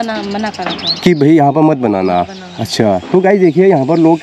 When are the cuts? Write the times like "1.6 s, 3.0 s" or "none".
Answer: none